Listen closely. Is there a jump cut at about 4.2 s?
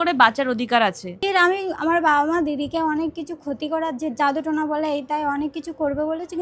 no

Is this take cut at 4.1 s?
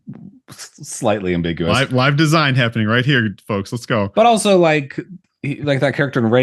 no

